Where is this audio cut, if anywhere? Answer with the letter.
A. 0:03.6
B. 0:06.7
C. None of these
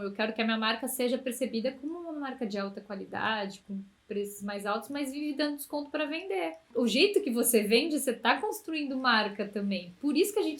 B